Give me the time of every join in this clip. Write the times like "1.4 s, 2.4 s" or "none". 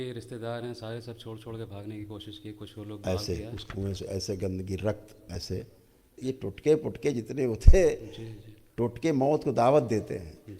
6.2 s